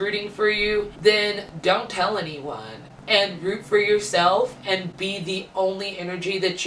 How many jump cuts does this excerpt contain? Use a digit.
1